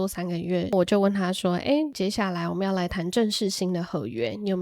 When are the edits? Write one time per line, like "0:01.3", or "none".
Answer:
0:00.7
0:01.9

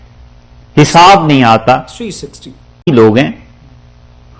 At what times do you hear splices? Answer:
0:02.9

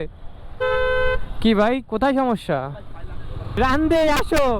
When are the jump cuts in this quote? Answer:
0:03.6

